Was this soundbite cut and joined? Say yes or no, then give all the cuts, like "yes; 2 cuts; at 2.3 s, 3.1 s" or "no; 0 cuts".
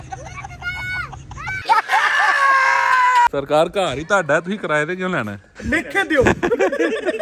yes; 2 cuts; at 3.3 s, 5.5 s